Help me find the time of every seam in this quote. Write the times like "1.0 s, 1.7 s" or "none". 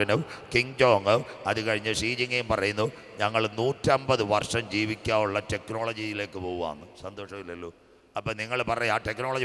none